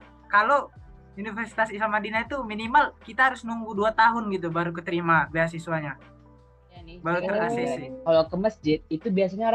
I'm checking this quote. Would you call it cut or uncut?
cut